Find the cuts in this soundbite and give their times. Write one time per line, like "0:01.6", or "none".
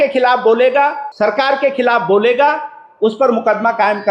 0:01.0